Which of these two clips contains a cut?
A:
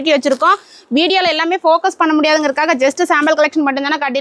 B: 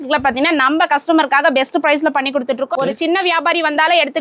B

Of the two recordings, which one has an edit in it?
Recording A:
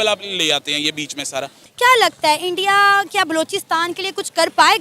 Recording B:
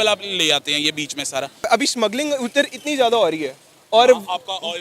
B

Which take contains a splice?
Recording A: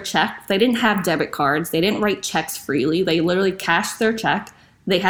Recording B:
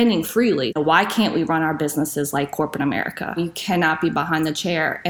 B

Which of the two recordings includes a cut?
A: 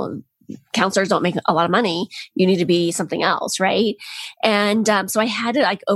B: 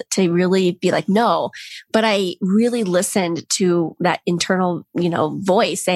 B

